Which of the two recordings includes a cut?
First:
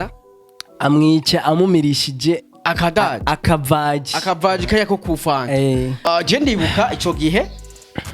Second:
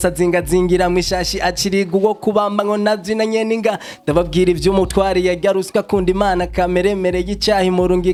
first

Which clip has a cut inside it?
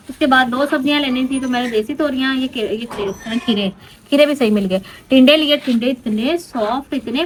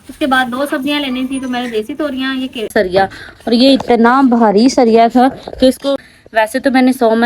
second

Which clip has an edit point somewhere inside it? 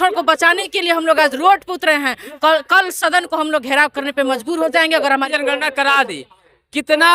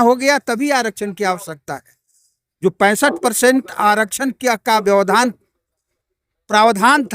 first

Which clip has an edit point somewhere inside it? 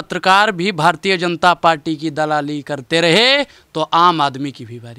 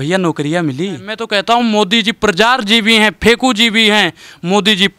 second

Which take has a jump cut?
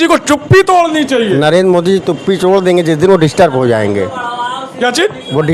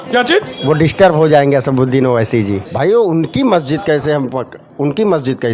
second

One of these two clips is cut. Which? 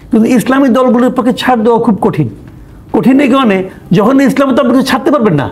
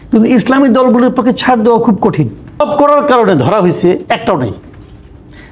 second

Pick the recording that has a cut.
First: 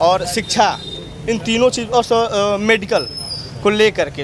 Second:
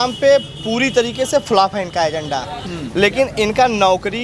second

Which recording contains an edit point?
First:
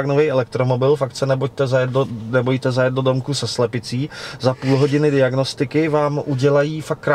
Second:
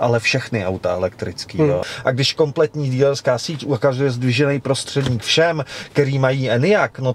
second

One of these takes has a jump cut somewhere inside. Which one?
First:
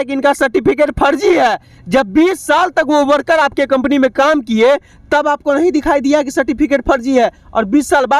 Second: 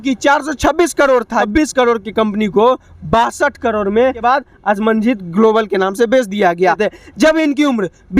second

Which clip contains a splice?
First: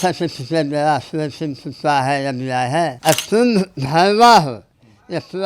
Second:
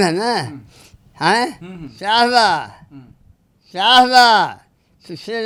first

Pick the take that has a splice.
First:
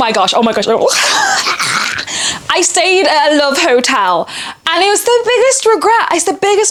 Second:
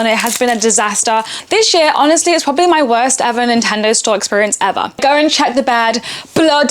second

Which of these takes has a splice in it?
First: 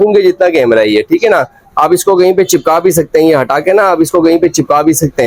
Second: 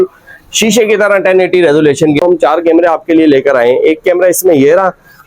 second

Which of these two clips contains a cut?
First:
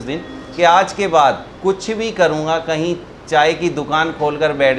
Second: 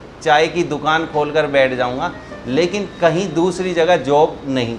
first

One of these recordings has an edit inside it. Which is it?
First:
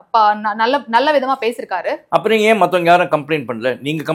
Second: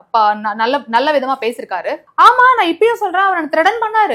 second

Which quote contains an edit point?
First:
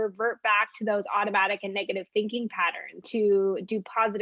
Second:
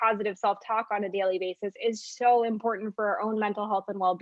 first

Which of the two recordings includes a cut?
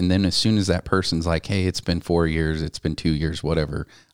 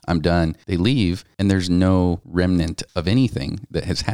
second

